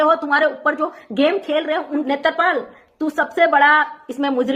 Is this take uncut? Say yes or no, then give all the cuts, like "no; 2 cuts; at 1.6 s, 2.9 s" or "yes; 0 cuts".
no; 1 cut; at 2.0 s